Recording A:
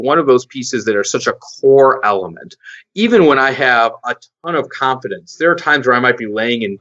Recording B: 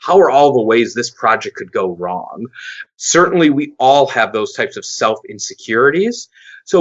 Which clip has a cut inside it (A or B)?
B